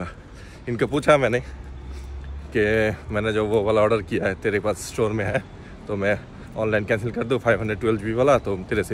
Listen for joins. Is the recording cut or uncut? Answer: uncut